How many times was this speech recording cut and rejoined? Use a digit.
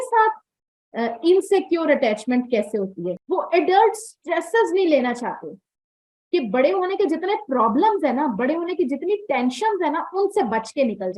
1